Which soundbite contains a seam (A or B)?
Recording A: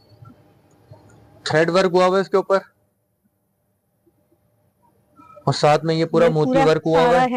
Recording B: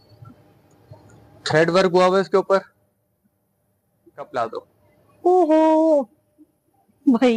B